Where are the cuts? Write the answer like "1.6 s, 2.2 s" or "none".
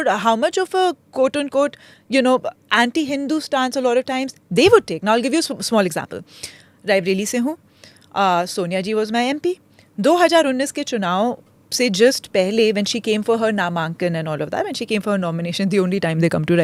none